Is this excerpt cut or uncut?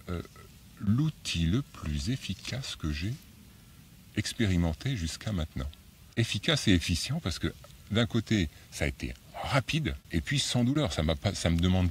cut